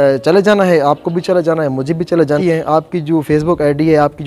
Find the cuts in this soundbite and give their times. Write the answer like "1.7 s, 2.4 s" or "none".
2.4 s